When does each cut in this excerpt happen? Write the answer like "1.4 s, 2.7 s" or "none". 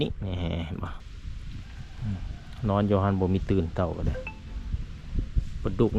1.0 s